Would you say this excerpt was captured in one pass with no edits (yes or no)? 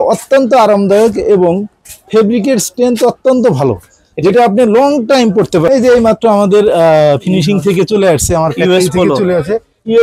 no